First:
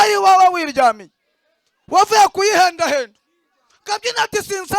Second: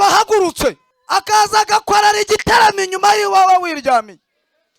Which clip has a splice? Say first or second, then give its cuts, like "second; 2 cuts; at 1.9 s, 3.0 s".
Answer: second; 1 cut; at 0.9 s